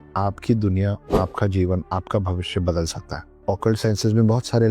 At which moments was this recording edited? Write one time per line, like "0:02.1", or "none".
0:03.3